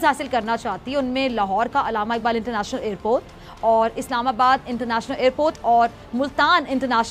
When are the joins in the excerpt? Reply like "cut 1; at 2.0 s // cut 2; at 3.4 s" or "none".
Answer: none